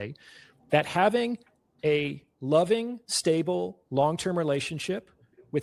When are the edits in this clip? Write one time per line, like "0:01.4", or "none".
none